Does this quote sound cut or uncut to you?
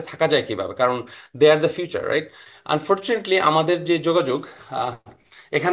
cut